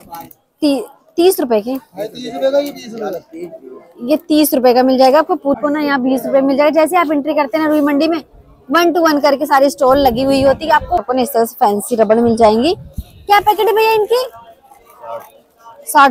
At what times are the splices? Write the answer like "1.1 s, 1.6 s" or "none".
5.6 s, 11.1 s